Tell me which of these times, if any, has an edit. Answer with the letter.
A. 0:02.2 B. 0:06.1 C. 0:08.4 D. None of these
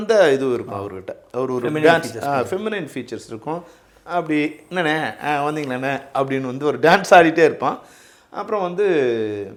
D